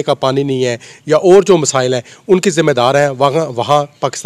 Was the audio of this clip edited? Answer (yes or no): no